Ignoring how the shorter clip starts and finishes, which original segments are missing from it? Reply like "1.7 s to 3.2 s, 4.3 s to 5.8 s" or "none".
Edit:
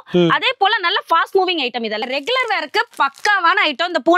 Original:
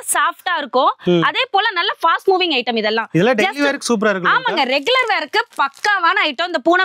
3.0 s to 4.6 s